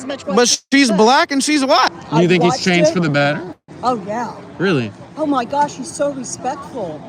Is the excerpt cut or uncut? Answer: cut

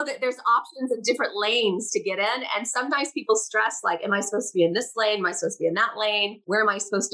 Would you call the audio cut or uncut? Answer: uncut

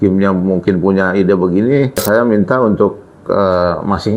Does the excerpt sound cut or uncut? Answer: cut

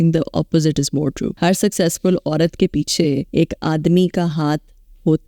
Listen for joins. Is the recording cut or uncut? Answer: cut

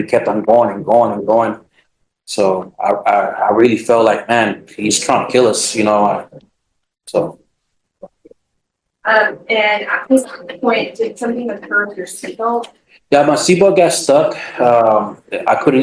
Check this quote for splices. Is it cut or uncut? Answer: uncut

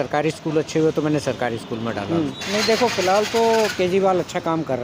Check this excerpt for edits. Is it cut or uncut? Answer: cut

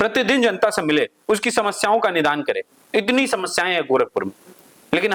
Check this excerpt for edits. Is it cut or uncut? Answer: uncut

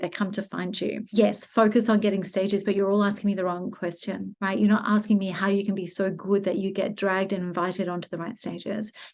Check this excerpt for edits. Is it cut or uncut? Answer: cut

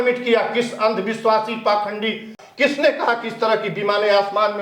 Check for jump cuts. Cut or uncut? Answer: cut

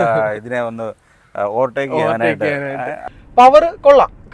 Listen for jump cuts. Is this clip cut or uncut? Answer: cut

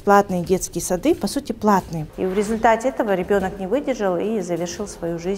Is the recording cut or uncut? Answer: cut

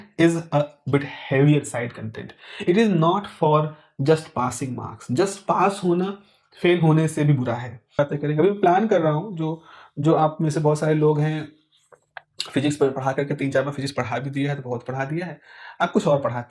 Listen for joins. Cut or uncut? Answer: cut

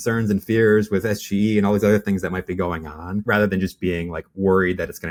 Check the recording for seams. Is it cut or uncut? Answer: uncut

